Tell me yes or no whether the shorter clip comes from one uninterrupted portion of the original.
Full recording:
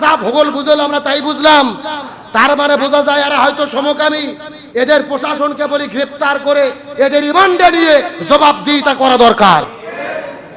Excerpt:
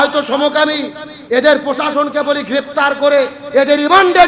yes